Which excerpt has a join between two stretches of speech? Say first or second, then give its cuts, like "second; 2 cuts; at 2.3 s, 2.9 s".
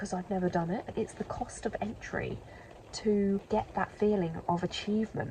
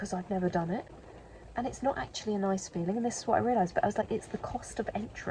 first; 2 cuts; at 0.9 s, 3.4 s